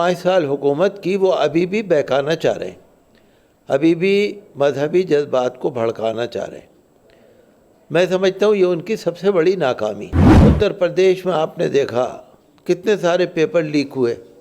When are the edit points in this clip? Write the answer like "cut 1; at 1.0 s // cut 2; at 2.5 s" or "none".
cut 1; at 10.3 s